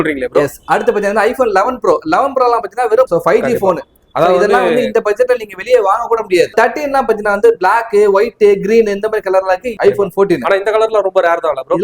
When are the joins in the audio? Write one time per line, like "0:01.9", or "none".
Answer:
0:03.1
0:06.5
0:09.7